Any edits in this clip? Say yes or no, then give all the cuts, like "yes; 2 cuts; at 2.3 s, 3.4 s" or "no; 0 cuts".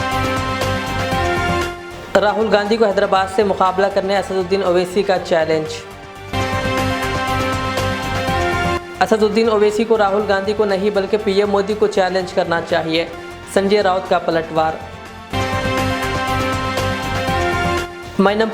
yes; 1 cut; at 1.6 s